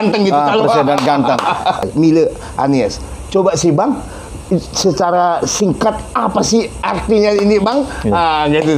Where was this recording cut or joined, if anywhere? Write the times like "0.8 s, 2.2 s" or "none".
1.8 s